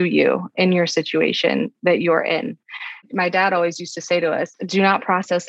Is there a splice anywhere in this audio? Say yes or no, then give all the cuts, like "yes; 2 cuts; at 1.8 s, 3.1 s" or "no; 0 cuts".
no; 0 cuts